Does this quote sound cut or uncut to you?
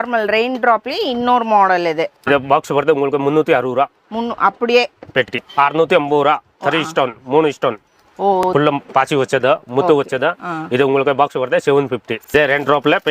cut